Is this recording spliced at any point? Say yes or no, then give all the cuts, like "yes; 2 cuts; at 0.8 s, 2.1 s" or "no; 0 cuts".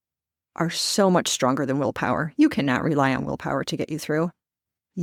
no; 0 cuts